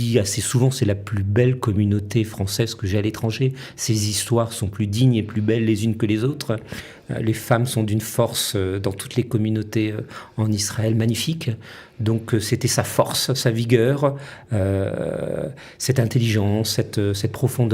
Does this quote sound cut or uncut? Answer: uncut